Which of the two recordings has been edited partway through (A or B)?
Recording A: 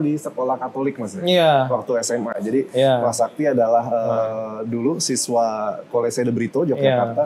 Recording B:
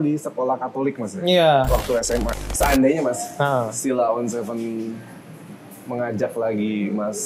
B